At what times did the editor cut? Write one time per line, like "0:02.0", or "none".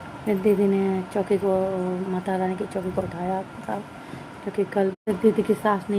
0:04.9